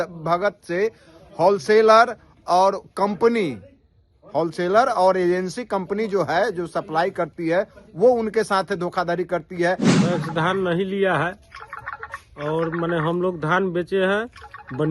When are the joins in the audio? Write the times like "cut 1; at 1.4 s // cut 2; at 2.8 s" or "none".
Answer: cut 1; at 9.9 s